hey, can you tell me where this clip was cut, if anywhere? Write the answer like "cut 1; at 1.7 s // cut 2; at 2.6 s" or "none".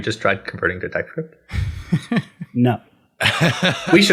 none